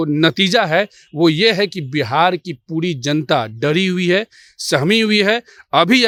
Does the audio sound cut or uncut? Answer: uncut